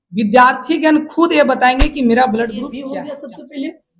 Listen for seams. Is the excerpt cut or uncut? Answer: cut